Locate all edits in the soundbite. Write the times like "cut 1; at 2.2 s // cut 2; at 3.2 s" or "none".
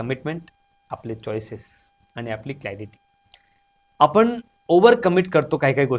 none

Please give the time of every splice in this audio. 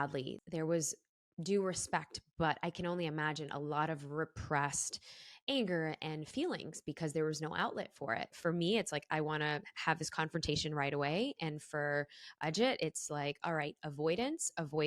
cut 1; at 8.3 s

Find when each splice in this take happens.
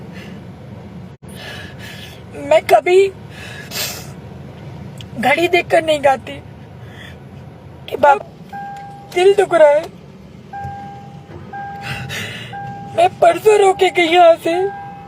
cut 1; at 8.2 s

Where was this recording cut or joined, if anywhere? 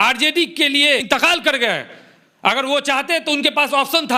none

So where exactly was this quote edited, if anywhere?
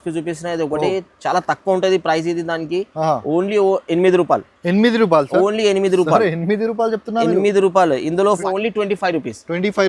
cut 1; at 8.4 s

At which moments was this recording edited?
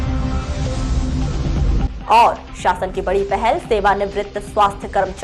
cut 1; at 1.8 s

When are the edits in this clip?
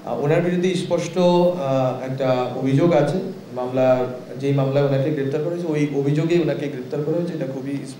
none

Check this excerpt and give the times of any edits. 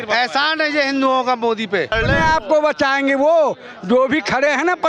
cut 1; at 1.9 s

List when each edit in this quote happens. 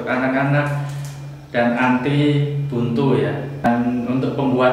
cut 1; at 3.7 s

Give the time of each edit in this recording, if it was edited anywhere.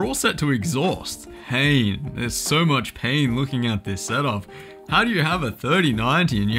cut 1; at 1.3 s

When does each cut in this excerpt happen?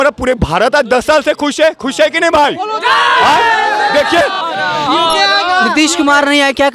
cut 1; at 4.4 s

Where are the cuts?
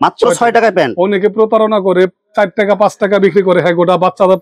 none

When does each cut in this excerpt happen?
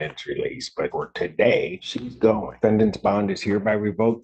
cut 1; at 0.9 s // cut 2; at 2.3 s

